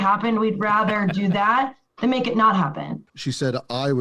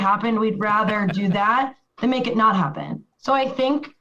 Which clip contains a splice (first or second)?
first